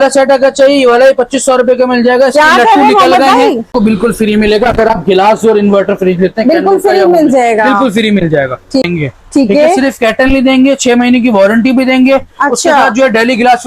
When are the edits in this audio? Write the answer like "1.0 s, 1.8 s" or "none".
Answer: 3.7 s, 8.8 s